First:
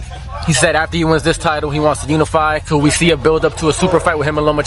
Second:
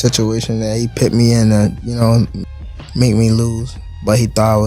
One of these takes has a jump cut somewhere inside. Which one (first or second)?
second